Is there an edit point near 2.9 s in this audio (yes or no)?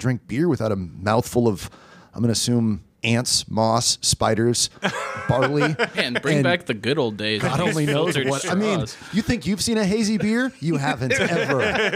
yes